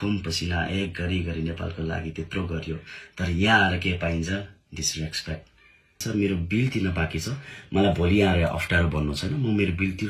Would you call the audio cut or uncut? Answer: cut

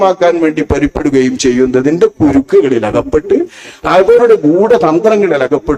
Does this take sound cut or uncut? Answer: uncut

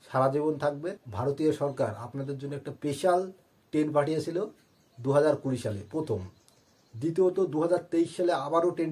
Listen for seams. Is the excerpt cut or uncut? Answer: cut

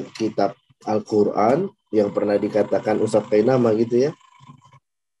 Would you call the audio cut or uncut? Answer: uncut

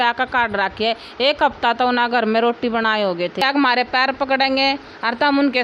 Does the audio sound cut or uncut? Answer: cut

